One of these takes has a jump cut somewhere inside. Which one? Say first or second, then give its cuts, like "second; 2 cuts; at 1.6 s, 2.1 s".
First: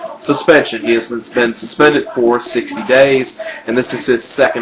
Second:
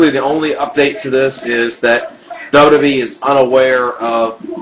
first; 1 cut; at 3.5 s